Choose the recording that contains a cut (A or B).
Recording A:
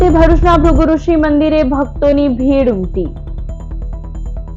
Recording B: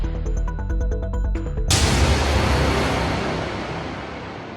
B